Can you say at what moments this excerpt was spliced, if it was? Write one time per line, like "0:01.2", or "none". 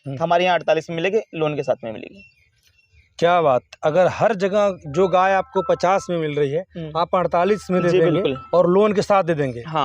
none

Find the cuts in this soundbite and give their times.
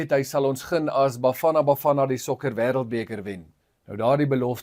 0:03.6

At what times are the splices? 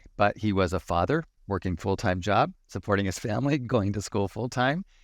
0:01.4

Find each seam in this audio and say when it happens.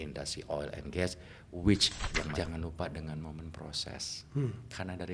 0:02.4

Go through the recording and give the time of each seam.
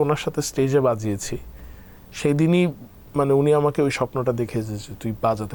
none

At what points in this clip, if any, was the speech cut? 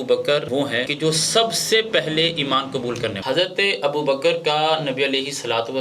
0:03.2

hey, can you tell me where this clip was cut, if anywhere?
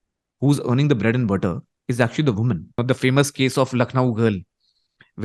0:02.8

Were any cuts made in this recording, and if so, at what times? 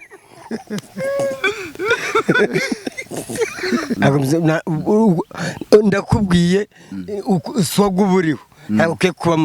0:03.9

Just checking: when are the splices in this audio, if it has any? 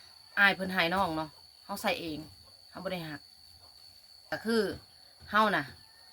0:04.1

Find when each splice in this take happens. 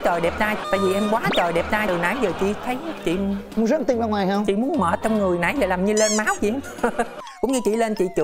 0:07.2

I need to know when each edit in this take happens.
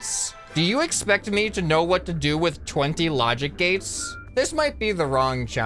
none

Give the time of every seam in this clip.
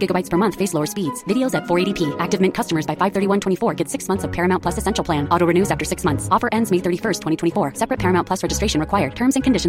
none

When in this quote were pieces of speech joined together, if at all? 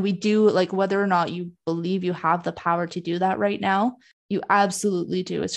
0:04.1

